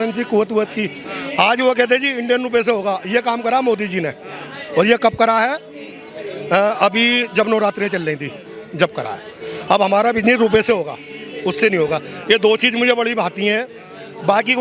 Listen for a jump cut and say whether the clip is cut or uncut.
uncut